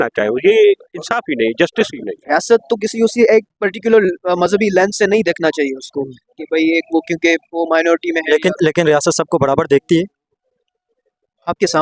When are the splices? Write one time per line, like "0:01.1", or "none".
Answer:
0:02.1